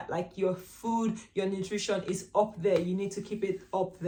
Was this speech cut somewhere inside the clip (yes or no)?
no